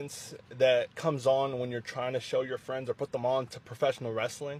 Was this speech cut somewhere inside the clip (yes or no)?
no